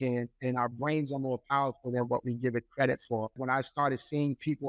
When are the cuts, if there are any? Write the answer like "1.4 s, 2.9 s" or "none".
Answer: 3.4 s